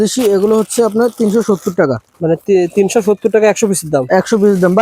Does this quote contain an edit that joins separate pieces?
no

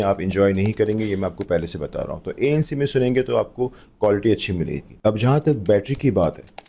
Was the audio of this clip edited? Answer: no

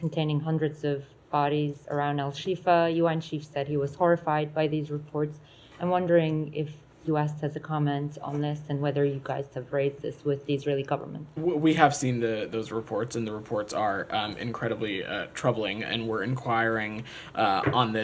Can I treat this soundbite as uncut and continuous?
yes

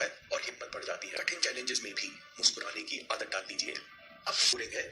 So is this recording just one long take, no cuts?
no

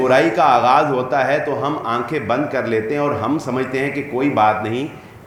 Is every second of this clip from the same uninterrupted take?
yes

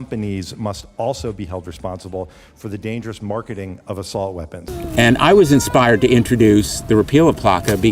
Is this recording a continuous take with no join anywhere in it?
no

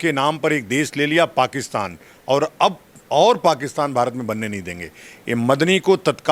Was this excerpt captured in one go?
yes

